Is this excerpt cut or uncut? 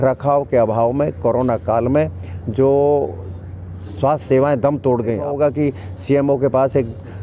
cut